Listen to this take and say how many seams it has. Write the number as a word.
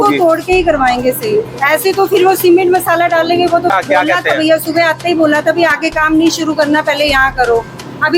one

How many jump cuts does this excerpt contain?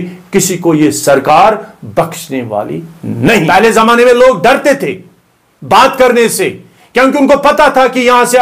one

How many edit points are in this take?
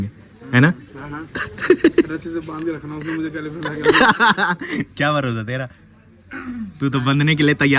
zero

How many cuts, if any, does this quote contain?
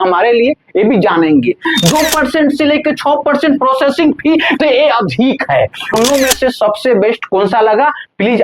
two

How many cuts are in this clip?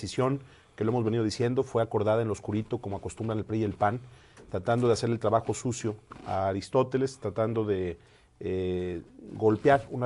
one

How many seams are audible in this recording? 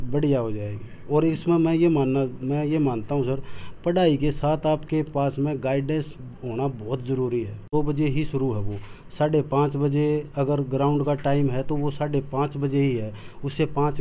one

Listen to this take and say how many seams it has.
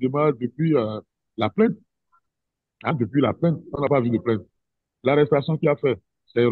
zero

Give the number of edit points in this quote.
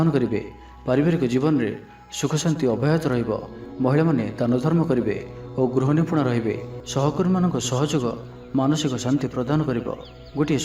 one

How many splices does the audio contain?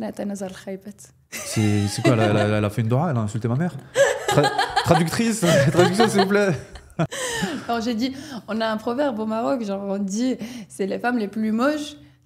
one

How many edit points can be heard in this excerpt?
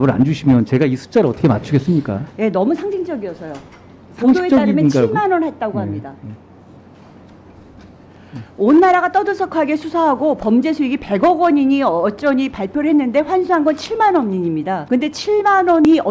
zero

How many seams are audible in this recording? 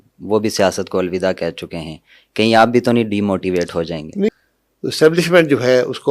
one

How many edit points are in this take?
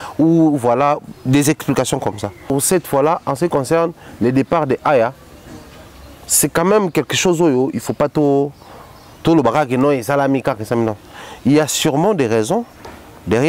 one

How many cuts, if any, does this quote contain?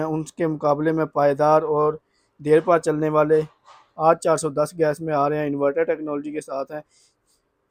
zero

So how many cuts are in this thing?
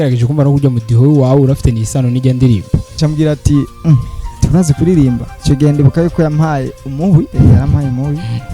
three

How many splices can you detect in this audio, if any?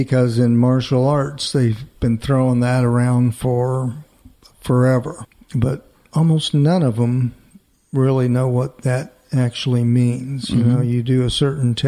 one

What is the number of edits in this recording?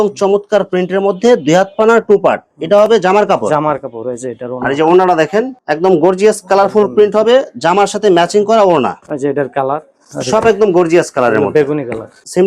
zero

